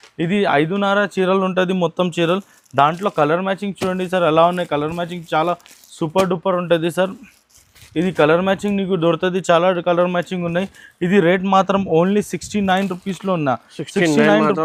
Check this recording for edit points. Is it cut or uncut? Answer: uncut